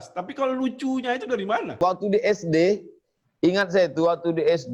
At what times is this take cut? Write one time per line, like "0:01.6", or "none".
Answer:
0:01.7